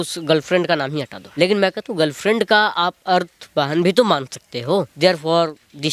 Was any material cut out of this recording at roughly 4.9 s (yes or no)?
yes